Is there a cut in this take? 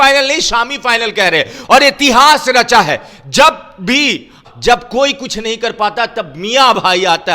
yes; 1 cut; at 4.4 s

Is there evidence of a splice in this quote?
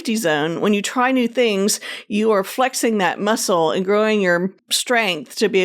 no; 0 cuts

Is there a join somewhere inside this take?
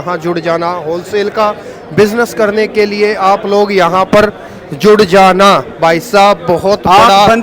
no; 0 cuts

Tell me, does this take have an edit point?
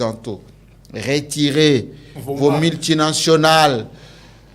no; 0 cuts

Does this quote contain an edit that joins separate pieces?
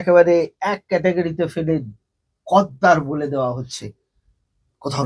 no; 0 cuts

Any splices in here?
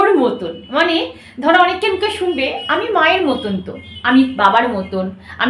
no; 0 cuts

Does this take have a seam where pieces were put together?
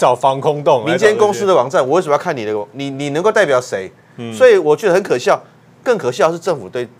no; 0 cuts

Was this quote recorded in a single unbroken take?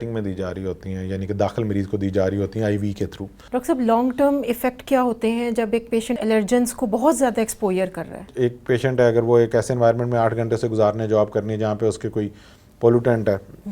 no; 1 cut; at 3.3 s

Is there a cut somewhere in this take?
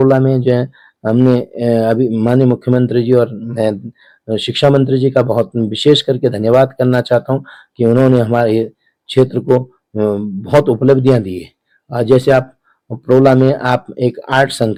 no; 0 cuts

